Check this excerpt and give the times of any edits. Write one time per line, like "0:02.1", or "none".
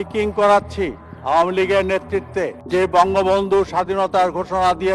none